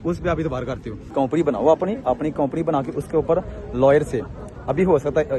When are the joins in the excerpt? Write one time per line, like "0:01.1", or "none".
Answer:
0:00.9